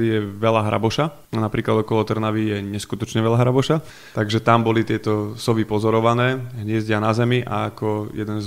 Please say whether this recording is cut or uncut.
cut